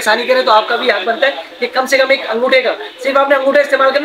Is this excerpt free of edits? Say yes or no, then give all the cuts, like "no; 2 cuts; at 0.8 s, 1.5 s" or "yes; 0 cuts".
yes; 0 cuts